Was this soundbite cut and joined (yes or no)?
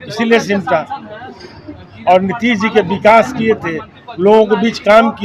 no